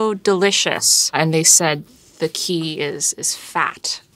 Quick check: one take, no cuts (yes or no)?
yes